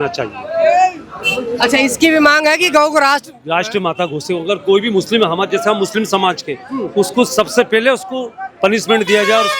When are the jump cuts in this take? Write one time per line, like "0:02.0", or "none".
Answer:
none